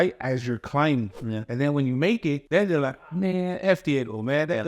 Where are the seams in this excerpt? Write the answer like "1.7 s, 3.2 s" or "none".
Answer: 1.2 s, 2.4 s

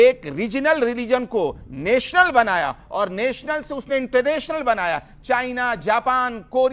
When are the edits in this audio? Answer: none

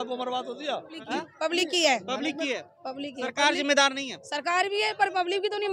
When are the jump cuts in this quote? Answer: 0.9 s

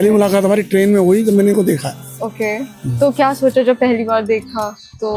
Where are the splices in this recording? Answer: none

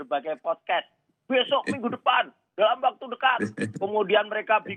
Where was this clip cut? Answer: none

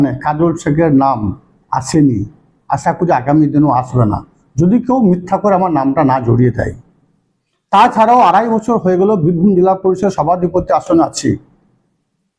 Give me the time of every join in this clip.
none

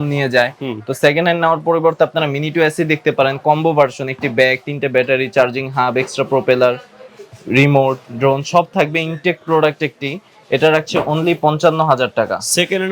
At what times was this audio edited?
none

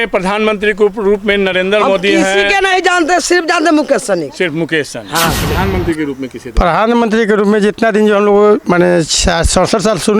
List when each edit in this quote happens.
5.4 s

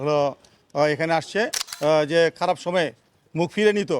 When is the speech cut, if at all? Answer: 1.6 s

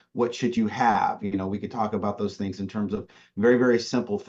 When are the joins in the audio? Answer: none

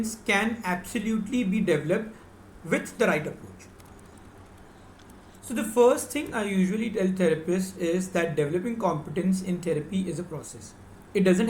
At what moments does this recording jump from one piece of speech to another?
5.4 s

